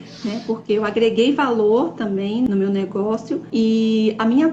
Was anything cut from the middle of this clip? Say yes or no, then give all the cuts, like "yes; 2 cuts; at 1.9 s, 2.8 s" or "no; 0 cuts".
yes; 2 cuts; at 2.5 s, 3.4 s